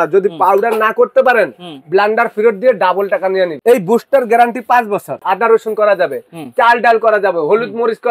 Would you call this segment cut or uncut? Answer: cut